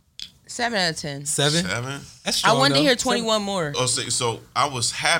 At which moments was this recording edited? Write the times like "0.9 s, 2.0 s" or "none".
3.7 s